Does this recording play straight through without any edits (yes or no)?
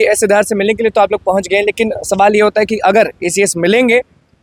yes